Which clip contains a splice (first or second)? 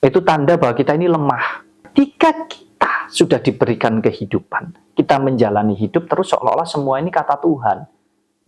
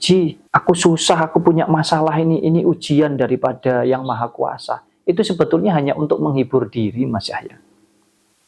first